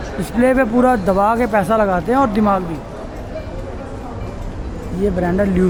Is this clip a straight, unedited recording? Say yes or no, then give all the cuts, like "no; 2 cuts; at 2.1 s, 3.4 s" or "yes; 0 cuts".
yes; 0 cuts